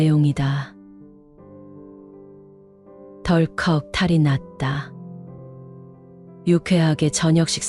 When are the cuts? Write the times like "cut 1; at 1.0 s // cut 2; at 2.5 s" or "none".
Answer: cut 1; at 1.0 s // cut 2; at 2.5 s